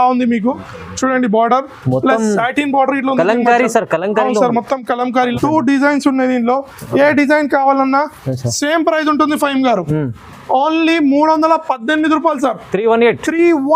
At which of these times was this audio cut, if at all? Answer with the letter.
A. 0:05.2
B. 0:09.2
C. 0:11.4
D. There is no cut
A